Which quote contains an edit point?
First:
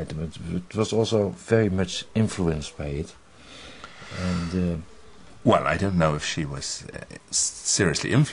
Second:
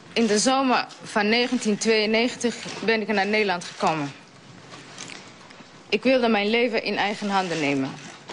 first; 1 cut; at 2.3 s

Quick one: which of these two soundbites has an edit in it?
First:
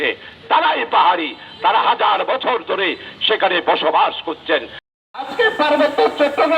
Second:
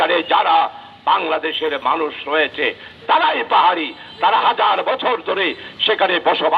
first; 1 cut; at 4.9 s

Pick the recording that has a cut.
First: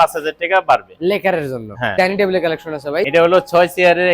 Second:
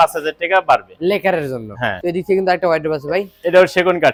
first; 2 cuts; at 1.9 s, 3.1 s

